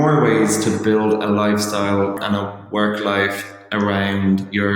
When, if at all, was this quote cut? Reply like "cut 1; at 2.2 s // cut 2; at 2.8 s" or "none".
cut 1; at 2.2 s